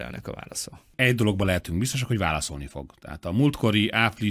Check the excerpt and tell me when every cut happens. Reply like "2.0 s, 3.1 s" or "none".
0.9 s